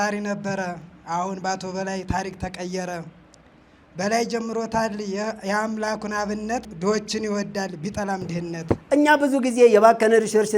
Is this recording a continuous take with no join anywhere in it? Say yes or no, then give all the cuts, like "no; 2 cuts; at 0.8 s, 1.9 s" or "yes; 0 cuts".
no; 2 cuts; at 6.6 s, 8.8 s